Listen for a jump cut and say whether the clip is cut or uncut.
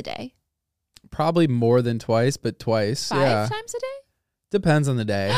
uncut